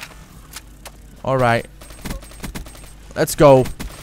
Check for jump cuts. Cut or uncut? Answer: uncut